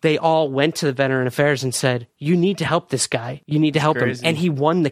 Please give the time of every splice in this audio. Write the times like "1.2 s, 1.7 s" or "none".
2.1 s, 3.3 s